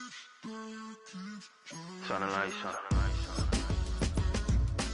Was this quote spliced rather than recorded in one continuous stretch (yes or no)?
yes